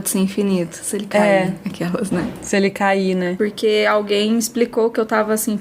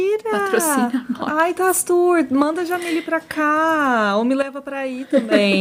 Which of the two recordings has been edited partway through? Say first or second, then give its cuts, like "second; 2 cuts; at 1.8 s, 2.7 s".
first; 1 cut; at 3.4 s